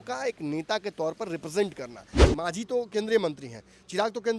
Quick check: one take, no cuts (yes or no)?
no